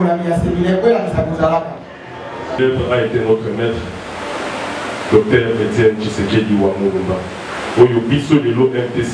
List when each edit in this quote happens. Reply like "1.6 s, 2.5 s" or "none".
2.6 s